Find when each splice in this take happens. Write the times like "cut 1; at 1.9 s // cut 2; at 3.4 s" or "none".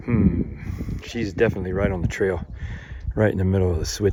none